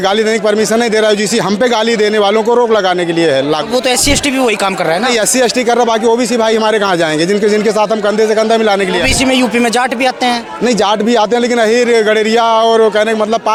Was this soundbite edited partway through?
no; 0 cuts

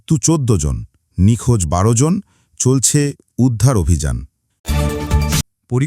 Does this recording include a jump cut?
yes; 1 cut; at 4.5 s

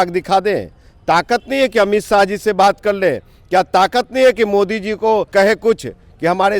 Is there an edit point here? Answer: yes; 1 cut; at 5.3 s

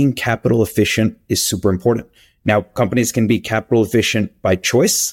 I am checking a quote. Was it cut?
no; 0 cuts

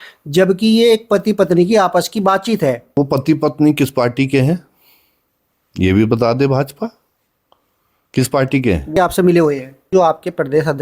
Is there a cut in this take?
yes; 3 cuts; at 3.0 s, 8.9 s, 9.9 s

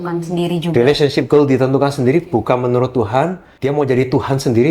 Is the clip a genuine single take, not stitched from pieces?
no; 1 cut; at 3.5 s

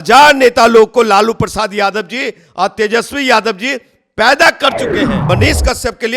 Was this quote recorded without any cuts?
no; 1 cut; at 5.2 s

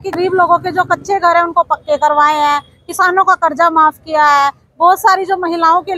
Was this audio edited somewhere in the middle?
no; 0 cuts

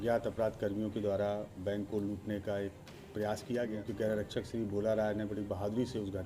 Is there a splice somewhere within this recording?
yes; 1 cut; at 3.7 s

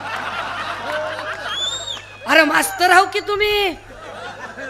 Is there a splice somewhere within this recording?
no; 0 cuts

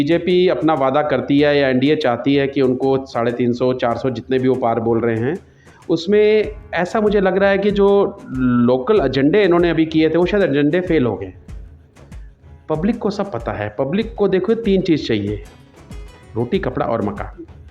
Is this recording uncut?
yes; 0 cuts

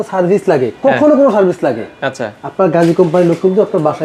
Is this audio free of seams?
yes; 0 cuts

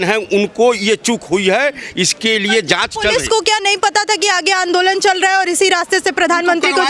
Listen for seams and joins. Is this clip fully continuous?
yes; 0 cuts

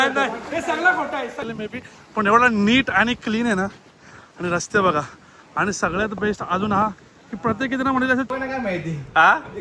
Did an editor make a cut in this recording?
yes; 2 cuts; at 1.4 s, 8.3 s

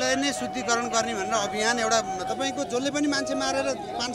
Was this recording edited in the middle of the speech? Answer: yes; 1 cut; at 2.2 s

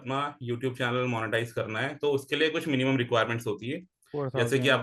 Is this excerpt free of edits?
yes; 0 cuts

